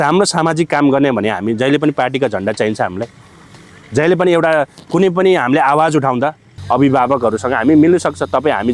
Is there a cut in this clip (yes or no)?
yes